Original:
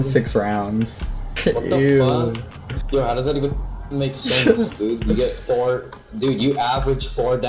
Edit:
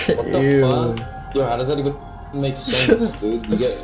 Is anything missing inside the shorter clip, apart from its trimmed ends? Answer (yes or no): yes